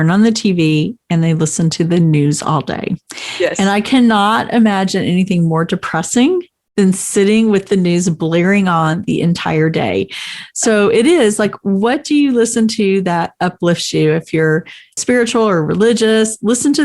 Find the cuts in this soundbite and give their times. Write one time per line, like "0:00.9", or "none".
0:15.0